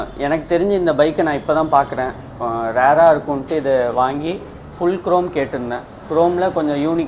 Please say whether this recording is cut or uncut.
uncut